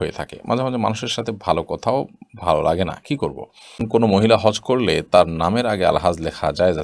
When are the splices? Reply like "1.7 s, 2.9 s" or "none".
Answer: 3.8 s